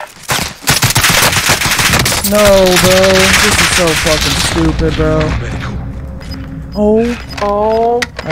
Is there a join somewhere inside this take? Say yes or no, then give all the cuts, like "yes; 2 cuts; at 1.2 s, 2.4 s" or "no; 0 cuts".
no; 0 cuts